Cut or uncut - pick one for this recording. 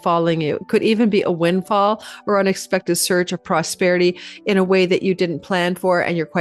uncut